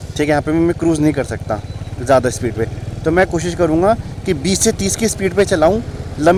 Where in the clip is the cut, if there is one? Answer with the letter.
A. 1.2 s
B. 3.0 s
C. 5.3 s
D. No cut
D